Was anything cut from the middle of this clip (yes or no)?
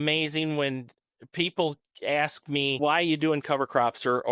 yes